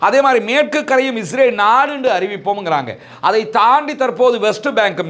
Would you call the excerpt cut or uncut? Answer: uncut